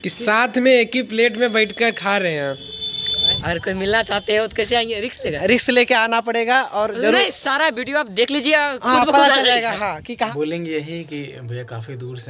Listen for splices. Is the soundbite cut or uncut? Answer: cut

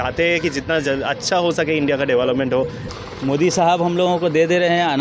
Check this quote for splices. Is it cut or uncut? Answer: cut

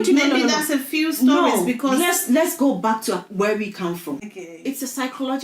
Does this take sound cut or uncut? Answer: cut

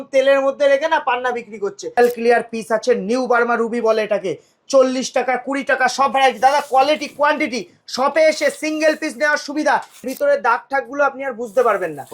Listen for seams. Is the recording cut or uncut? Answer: cut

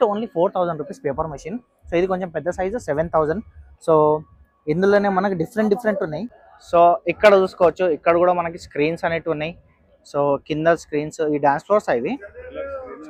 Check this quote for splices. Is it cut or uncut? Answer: uncut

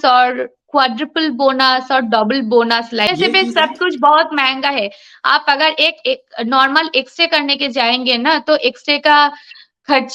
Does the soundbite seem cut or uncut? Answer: cut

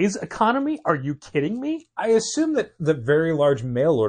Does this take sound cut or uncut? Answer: uncut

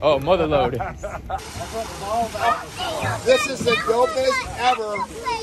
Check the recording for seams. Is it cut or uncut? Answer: cut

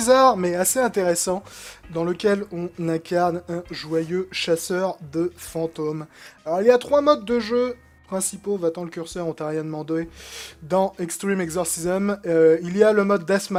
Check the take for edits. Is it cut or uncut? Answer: uncut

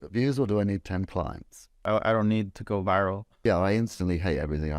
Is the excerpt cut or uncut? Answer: cut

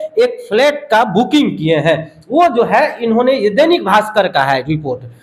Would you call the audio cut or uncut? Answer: uncut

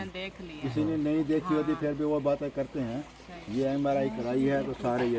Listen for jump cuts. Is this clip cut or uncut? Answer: uncut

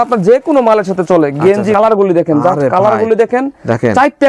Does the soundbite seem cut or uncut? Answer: cut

